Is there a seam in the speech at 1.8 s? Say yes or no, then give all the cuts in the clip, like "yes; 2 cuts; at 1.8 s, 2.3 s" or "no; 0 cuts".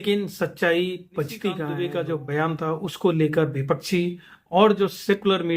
yes; 1 cut; at 1.8 s